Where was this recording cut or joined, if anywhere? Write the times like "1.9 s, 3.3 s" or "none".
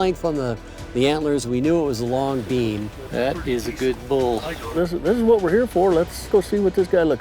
2.9 s, 4.7 s, 6.3 s